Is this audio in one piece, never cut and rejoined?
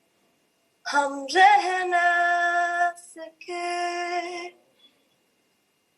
yes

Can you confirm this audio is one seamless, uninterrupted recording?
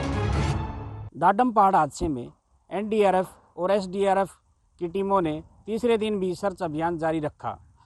no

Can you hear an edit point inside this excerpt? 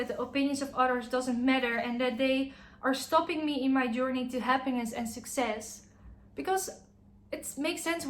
no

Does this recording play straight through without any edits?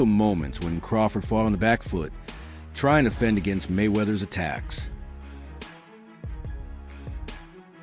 no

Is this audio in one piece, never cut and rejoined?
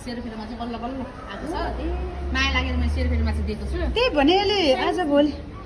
yes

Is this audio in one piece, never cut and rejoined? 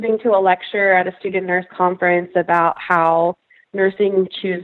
yes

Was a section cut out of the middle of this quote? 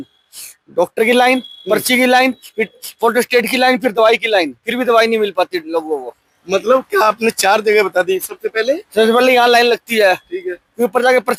no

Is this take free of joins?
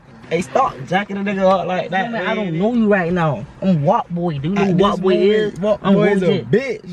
no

